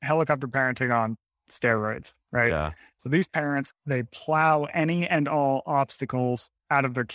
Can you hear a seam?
no; 0 cuts

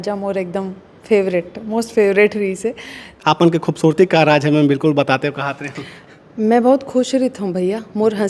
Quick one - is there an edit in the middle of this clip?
yes; 1 cut; at 3.2 s

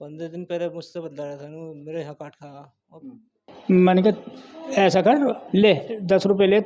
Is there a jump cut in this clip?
yes; 2 cuts; at 3.5 s, 5.4 s

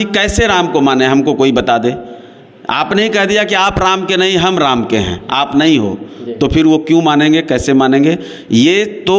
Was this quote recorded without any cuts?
yes; 0 cuts

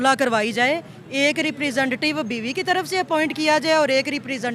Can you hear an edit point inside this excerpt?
no; 0 cuts

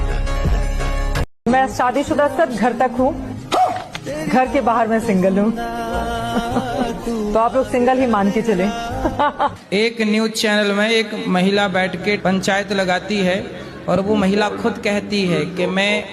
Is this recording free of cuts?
no; 1 cut; at 1.3 s

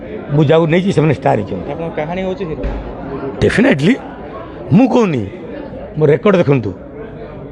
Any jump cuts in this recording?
no; 0 cuts

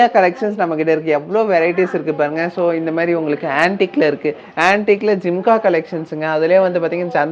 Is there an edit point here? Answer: no; 0 cuts

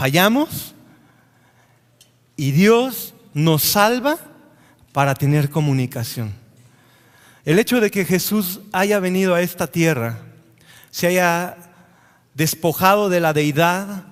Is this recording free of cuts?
yes; 0 cuts

